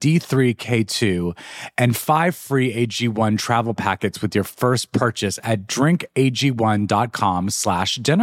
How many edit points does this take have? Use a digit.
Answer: 0